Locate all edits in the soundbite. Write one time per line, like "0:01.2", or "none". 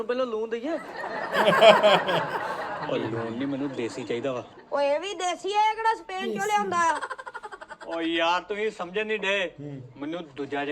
none